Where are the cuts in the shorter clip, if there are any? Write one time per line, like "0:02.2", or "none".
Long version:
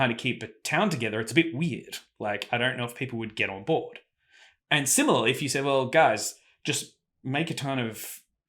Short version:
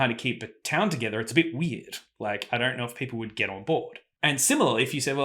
0:04.0